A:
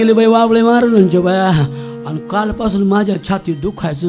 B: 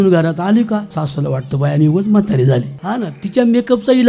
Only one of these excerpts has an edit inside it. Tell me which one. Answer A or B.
B